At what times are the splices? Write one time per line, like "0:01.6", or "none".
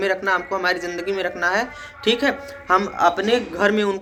none